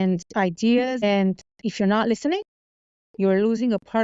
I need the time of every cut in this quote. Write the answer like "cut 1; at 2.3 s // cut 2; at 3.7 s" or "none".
cut 1; at 1.0 s